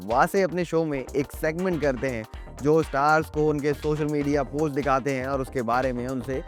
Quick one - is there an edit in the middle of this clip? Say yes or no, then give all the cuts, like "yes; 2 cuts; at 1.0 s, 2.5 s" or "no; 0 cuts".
no; 0 cuts